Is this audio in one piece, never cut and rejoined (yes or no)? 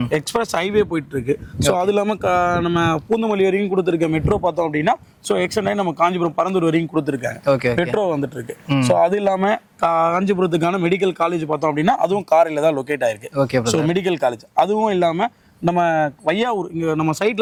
yes